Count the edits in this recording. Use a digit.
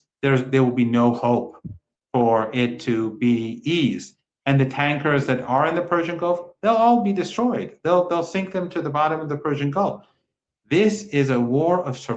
0